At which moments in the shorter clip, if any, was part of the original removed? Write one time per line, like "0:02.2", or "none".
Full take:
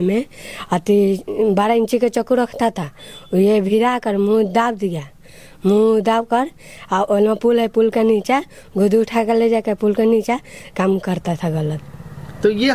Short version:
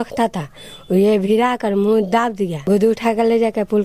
0:02.5